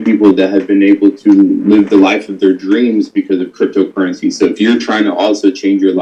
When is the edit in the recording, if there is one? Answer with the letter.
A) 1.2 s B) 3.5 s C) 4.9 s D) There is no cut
D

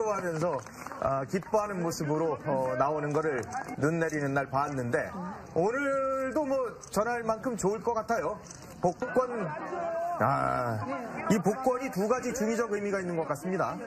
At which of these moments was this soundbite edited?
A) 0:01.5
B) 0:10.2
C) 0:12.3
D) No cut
B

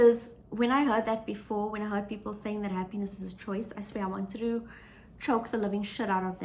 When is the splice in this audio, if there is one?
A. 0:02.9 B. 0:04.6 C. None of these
C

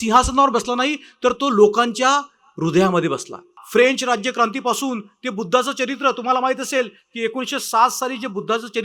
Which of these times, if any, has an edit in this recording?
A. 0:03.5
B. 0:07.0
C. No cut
A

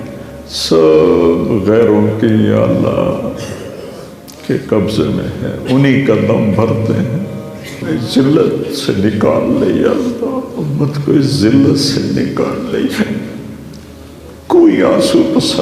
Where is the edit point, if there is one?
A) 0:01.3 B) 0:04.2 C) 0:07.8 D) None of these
C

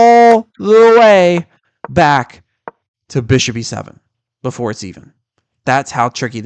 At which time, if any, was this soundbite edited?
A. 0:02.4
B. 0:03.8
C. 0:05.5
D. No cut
D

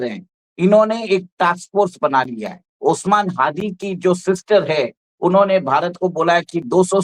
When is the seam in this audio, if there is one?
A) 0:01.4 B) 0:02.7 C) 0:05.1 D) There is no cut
B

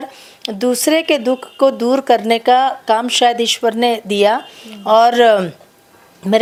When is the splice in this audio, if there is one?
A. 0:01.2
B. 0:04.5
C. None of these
C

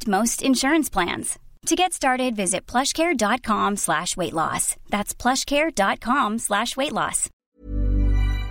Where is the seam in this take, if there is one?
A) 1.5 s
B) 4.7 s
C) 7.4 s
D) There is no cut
C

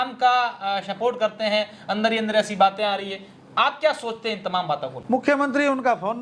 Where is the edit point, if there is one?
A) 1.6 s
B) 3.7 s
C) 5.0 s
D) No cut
C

